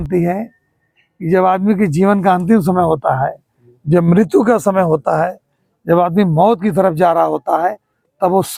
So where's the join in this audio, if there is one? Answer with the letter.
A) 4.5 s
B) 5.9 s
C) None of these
C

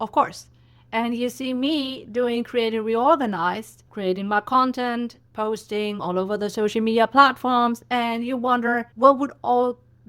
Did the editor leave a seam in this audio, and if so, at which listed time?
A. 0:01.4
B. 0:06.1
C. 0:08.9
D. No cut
C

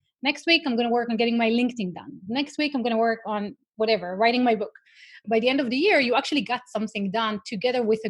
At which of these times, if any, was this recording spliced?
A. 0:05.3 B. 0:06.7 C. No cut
A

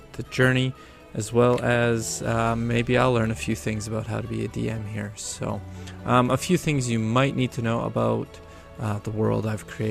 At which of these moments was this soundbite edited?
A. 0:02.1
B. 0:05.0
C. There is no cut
B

